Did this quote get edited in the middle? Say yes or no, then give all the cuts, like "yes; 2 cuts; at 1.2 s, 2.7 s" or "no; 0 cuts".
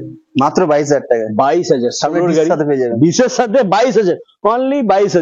no; 0 cuts